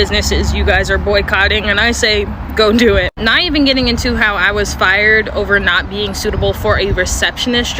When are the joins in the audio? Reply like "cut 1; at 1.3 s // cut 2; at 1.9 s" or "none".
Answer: none